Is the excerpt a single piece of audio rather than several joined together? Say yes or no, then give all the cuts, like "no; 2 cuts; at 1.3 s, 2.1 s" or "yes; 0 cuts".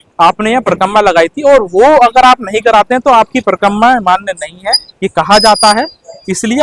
yes; 0 cuts